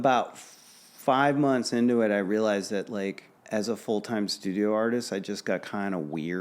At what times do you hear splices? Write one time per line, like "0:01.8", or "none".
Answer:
0:03.3